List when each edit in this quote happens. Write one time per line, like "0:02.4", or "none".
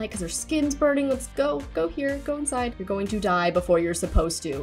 0:02.7